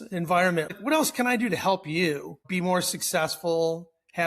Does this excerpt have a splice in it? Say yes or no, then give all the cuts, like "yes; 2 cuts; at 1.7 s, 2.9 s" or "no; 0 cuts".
yes; 2 cuts; at 0.7 s, 2.4 s